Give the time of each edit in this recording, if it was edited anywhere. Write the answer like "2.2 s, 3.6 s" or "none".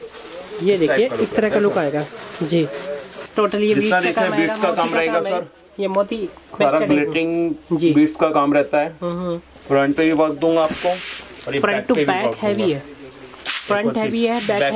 3.1 s